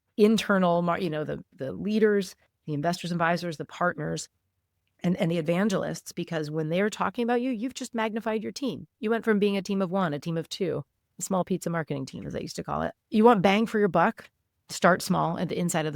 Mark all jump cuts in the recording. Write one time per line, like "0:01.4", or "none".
0:12.9

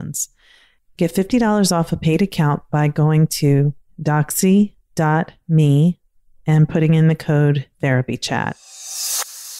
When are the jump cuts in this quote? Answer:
0:08.6

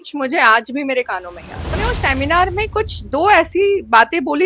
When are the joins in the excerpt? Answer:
0:01.8

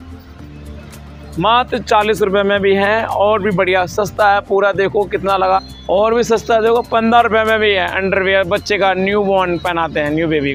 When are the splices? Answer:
none

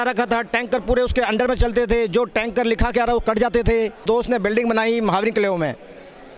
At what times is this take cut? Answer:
0:04.0

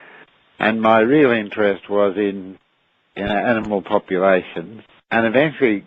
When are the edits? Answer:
none

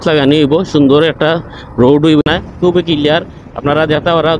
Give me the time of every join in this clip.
0:02.2

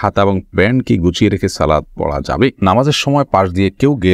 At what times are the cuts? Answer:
0:02.6

